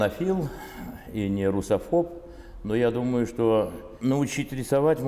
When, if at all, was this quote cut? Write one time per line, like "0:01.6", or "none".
0:03.8